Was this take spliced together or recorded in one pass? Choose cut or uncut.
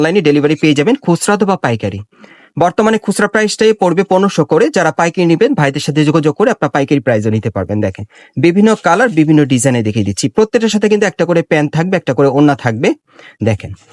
uncut